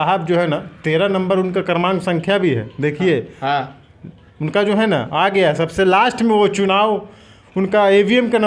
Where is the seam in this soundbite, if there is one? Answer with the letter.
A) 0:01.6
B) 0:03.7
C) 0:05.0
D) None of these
D